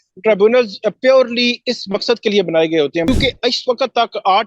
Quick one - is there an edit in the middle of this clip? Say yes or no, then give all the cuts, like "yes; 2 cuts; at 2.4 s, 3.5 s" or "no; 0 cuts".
yes; 1 cut; at 3.1 s